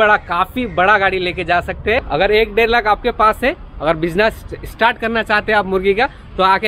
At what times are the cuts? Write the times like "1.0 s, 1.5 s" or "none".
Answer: 2.0 s